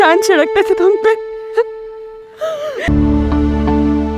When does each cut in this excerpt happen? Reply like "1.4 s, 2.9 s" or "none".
2.9 s